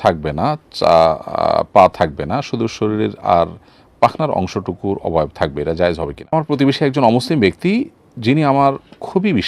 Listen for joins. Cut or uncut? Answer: cut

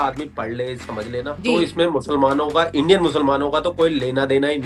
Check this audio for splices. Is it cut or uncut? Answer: uncut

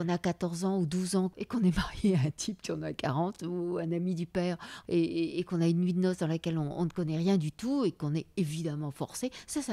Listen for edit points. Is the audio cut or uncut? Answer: cut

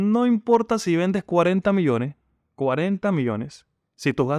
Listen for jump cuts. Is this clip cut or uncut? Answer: uncut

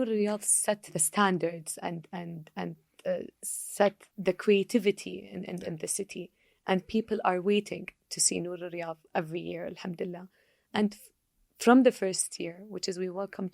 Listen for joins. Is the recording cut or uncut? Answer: cut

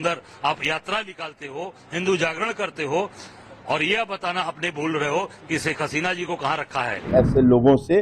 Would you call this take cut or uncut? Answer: cut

